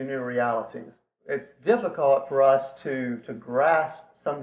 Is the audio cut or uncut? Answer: cut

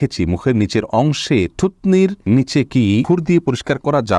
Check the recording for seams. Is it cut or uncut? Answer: cut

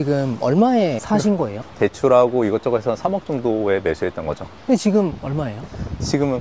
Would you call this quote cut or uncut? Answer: cut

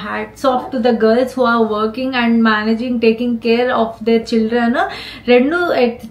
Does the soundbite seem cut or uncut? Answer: uncut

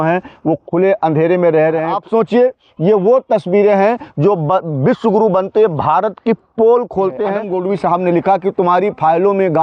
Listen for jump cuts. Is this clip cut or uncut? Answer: cut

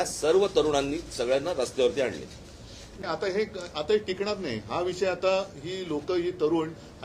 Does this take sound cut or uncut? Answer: cut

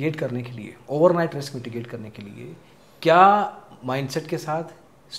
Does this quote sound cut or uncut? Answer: uncut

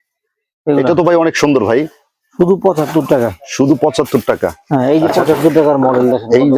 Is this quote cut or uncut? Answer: uncut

